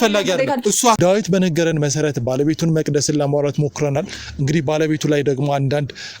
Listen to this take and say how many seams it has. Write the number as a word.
one